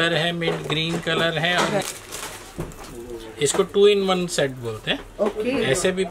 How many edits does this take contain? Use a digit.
1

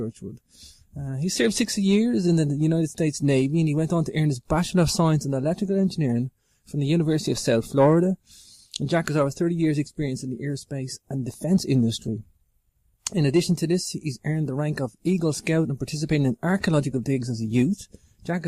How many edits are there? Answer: 1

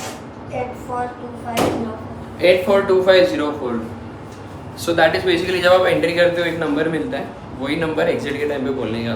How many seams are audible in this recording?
0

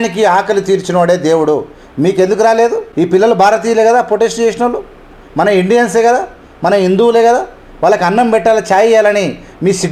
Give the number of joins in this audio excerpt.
0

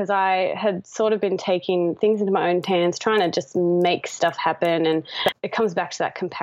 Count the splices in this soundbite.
1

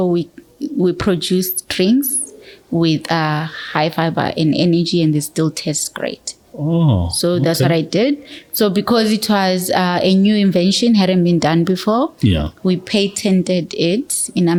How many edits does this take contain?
0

